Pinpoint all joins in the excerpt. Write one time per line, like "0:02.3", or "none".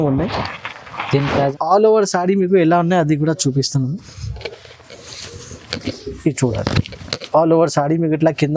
0:01.5